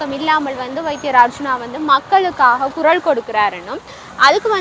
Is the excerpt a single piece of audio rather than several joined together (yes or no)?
yes